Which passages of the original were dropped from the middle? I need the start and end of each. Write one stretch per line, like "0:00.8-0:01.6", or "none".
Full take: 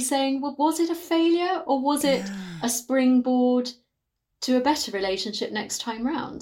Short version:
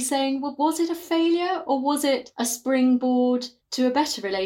0:02.3-0:02.5
0:03.8-0:04.3